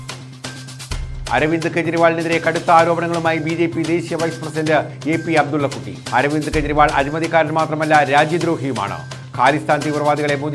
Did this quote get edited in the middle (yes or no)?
yes